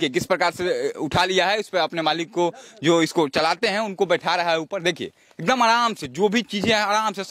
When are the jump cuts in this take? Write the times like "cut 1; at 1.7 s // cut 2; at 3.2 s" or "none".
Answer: none